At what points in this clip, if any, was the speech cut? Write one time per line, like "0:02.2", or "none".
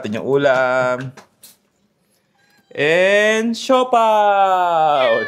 none